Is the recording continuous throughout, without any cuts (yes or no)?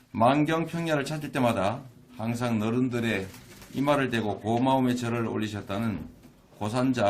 no